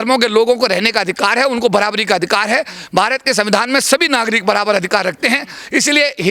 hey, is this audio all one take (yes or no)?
yes